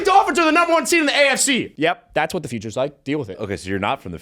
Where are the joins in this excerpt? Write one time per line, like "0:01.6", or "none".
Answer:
0:01.7
0:03.3